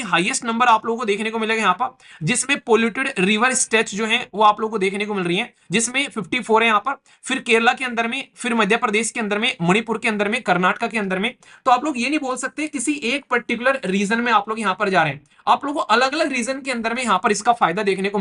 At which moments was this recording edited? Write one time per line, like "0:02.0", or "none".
none